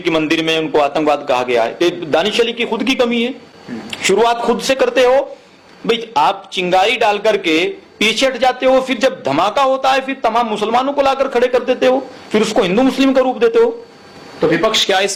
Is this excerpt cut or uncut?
uncut